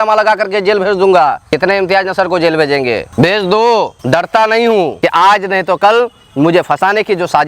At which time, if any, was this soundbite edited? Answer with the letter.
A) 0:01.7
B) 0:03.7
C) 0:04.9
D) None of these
C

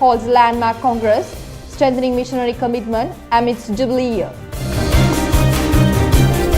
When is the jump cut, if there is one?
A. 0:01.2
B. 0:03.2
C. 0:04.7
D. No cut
C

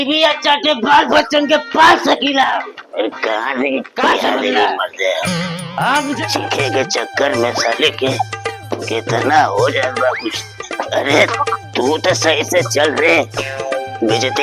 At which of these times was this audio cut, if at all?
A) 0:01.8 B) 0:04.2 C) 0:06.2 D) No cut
C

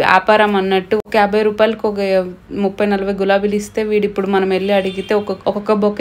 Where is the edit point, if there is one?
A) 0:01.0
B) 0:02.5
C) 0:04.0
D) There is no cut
A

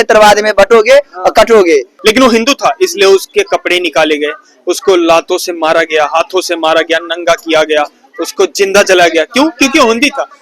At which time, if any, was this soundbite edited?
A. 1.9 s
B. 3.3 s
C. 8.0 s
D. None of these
A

